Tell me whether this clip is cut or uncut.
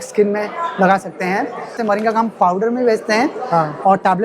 cut